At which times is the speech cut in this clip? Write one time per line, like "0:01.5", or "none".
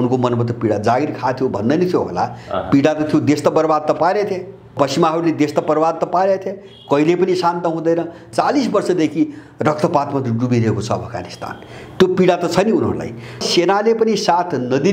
0:04.7
0:08.2
0:13.4